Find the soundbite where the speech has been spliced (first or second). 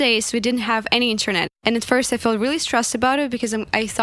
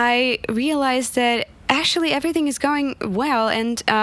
first